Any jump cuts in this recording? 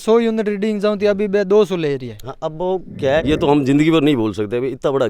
yes; 1 cut; at 3.2 s

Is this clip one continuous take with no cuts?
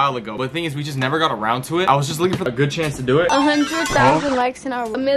no; 1 cut; at 3.3 s

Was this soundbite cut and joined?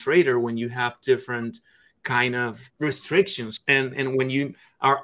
yes; 2 cuts; at 2.6 s, 3.5 s

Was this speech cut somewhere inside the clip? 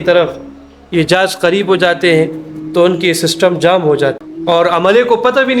yes; 1 cut; at 4.3 s

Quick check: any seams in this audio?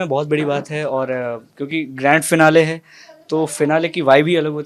no; 0 cuts

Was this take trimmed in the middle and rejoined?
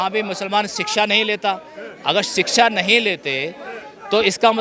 no; 0 cuts

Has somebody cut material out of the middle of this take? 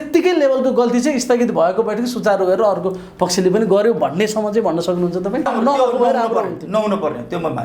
yes; 1 cut; at 5.5 s

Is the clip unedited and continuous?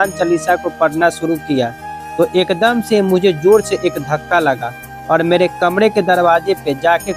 yes; 0 cuts

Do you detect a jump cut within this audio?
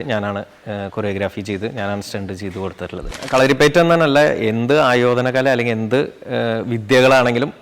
yes; 1 cut; at 3.2 s

